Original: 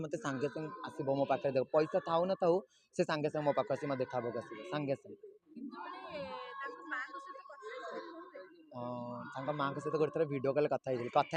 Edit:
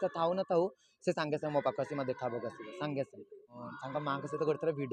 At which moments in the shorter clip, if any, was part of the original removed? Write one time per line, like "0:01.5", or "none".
0:03.6